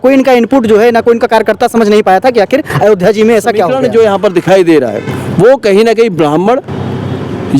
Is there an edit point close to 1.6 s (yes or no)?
no